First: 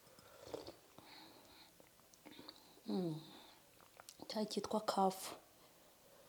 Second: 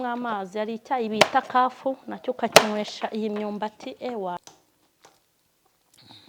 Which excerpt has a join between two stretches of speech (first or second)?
second